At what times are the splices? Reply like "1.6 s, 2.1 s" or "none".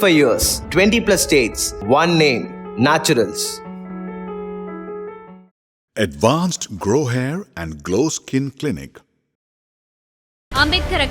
none